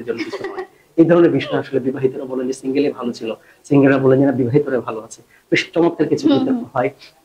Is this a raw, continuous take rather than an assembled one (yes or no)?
yes